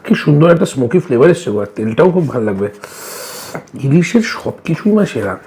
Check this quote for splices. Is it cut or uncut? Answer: uncut